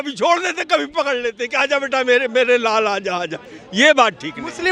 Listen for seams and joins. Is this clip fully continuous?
yes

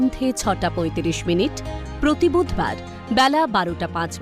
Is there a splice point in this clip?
no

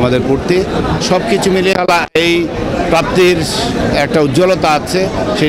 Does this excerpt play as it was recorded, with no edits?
yes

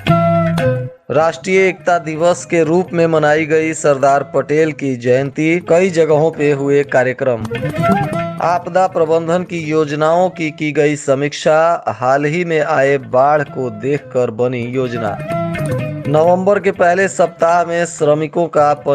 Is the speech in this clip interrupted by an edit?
yes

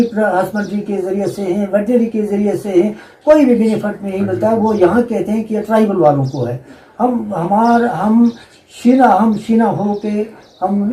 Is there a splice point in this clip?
no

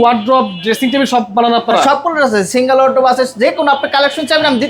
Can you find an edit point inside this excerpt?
no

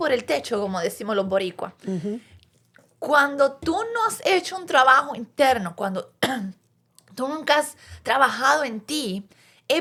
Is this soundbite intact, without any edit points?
yes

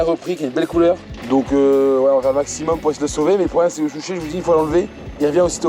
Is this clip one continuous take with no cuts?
no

